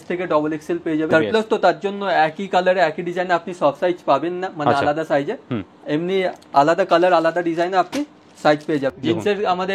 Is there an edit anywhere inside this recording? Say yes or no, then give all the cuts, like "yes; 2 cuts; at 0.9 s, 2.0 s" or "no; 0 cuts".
yes; 2 cuts; at 1.1 s, 9.0 s